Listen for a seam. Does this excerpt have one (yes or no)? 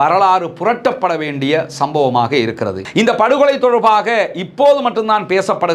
yes